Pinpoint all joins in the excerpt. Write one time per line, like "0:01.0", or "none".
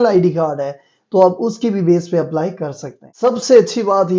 0:03.1